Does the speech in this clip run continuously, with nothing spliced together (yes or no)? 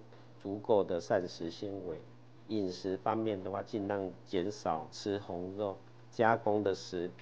no